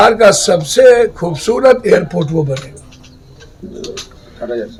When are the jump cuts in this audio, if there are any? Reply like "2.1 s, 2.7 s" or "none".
none